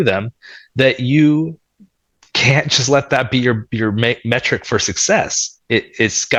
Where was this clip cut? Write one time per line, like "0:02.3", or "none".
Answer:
none